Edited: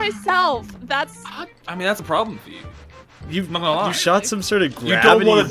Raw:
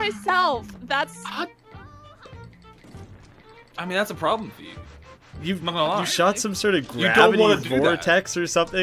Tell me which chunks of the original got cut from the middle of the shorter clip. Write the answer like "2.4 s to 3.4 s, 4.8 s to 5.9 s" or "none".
2.0 s to 4.1 s